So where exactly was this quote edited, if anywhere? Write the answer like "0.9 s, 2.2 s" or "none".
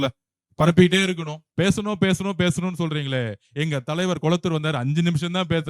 1.4 s